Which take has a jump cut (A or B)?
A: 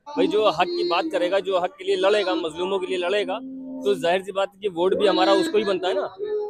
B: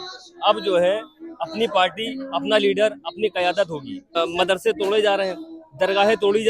B